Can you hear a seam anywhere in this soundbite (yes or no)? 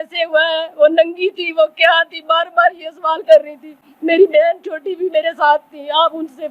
no